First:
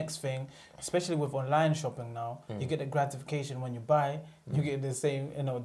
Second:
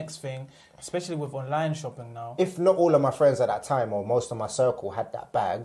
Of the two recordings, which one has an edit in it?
second; 1 cut; at 2.2 s

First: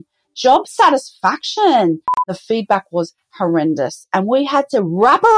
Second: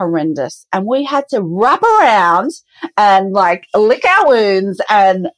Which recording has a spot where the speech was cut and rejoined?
first; 1 cut; at 2.3 s

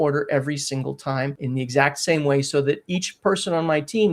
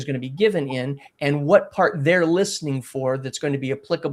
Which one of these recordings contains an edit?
first; 1 cut; at 1.4 s

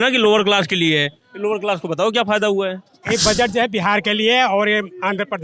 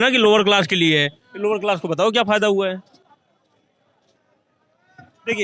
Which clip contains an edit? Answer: first; 1 cut; at 3.0 s

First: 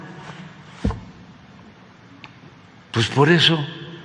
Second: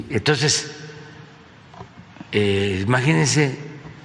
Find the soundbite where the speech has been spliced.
second; 1 cut; at 1.1 s

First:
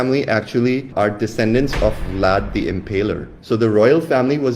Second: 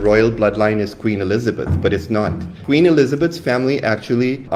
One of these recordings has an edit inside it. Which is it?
first; 1 cut; at 3.3 s

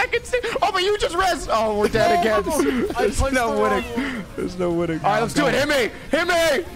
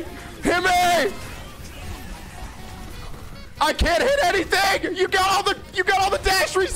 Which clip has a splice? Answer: first; 2 cuts; at 2.9 s, 5.0 s

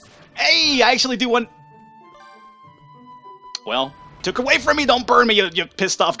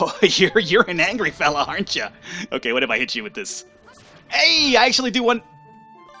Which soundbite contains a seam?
first; 1 cut; at 4.2 s

